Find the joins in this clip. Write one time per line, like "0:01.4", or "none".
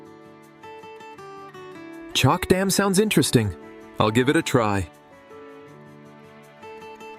0:02.1